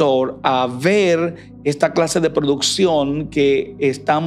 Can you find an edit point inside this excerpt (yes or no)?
no